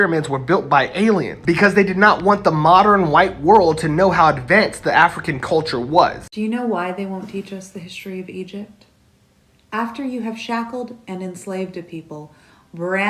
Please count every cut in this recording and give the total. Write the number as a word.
one